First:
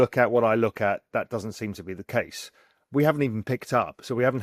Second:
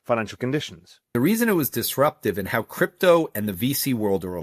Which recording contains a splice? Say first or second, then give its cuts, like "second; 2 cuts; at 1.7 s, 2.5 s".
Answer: second; 1 cut; at 1.1 s